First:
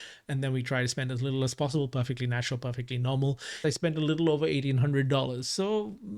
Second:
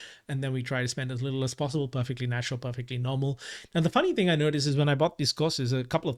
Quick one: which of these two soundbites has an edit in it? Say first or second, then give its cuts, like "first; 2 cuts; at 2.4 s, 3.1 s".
first; 1 cut; at 3.6 s